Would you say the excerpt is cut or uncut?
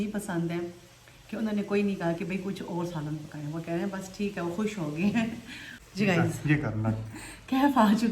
uncut